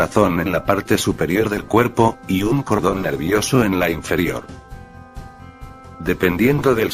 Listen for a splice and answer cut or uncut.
cut